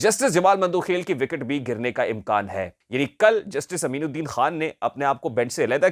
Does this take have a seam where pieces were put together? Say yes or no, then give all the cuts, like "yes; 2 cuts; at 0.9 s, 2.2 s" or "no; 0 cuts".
yes; 1 cut; at 2.8 s